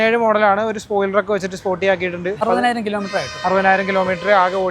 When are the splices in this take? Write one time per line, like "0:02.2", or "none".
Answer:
0:02.4